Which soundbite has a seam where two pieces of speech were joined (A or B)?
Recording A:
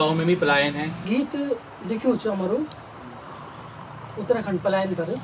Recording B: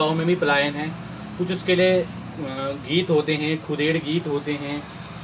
A